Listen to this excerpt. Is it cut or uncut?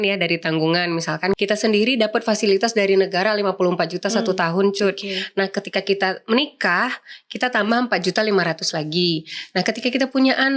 cut